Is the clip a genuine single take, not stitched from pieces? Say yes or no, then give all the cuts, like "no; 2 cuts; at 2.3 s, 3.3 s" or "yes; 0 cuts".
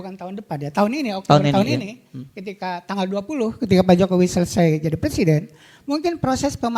yes; 0 cuts